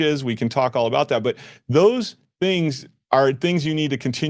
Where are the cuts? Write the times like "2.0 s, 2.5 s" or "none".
none